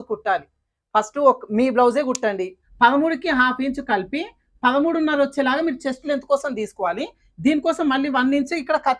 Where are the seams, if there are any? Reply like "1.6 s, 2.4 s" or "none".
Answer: 2.6 s